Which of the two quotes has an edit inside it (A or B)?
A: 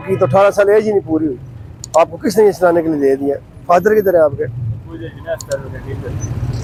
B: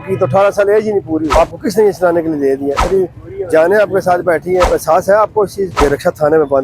B